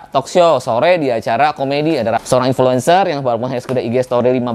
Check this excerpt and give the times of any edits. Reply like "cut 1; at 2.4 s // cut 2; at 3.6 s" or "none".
cut 1; at 2.2 s